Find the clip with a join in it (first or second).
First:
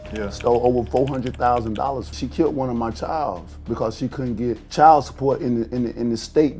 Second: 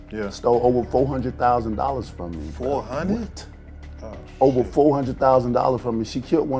first